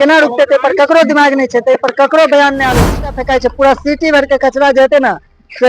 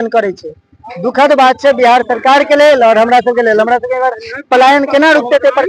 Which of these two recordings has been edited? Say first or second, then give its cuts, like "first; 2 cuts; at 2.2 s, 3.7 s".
first; 1 cut; at 3.2 s